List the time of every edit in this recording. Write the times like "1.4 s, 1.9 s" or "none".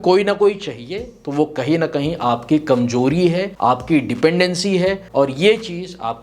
3.5 s, 5.0 s